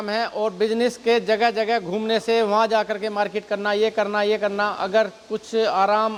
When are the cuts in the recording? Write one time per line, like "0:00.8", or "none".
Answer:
none